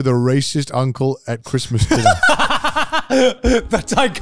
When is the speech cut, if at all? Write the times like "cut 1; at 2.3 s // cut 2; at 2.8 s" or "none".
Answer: none